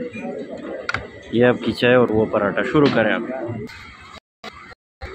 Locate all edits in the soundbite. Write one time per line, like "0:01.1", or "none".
0:03.7